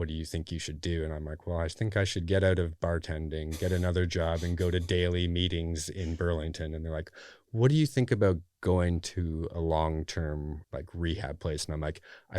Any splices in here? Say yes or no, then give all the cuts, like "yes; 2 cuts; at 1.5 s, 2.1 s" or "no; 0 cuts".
yes; 1 cut; at 10.6 s